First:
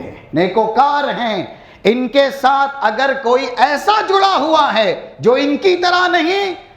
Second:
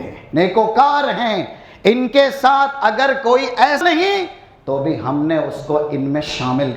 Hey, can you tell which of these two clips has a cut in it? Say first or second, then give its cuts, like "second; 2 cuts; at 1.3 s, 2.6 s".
second; 1 cut; at 3.8 s